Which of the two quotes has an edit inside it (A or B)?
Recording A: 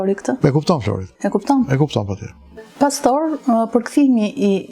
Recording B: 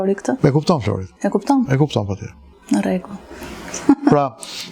A